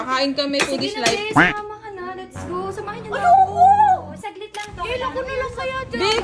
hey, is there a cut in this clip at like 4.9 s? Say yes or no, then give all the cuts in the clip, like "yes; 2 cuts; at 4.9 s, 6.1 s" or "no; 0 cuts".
yes; 1 cut; at 4.9 s